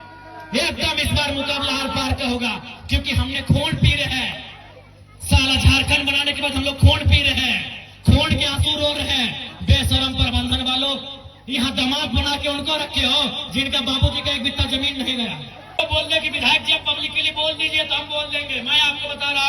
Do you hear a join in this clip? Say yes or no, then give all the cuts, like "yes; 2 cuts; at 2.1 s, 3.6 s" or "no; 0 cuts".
yes; 1 cut; at 15.8 s